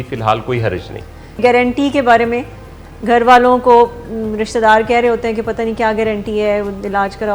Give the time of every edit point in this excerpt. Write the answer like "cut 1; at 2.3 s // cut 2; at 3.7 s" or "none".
cut 1; at 1.4 s